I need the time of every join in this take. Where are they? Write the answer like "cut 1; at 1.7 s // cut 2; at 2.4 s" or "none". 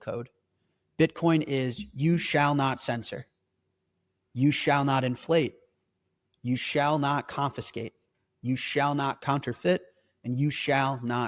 cut 1; at 9.2 s